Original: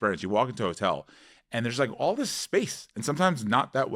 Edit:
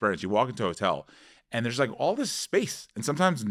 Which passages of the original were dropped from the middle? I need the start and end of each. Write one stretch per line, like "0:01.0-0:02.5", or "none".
none